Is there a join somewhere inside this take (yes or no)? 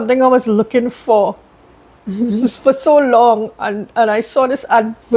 no